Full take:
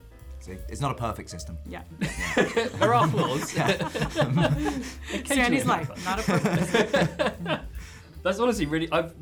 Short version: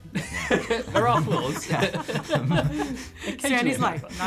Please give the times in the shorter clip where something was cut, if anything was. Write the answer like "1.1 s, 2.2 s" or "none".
none